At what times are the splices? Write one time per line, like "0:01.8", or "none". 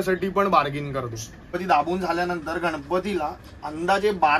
0:01.5